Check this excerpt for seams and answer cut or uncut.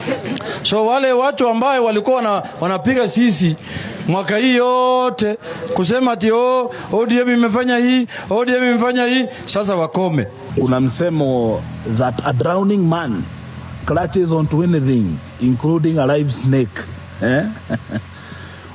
cut